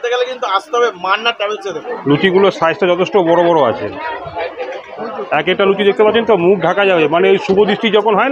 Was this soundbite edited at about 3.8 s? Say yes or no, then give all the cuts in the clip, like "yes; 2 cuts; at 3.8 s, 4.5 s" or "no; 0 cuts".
no; 1 cut; at 1.9 s